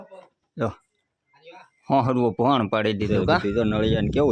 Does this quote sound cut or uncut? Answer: cut